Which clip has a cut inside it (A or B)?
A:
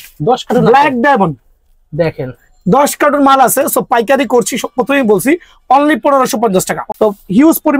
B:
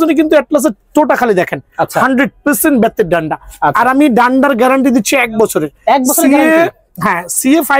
A